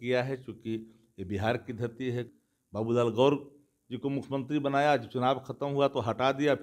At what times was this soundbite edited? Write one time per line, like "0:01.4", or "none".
0:02.3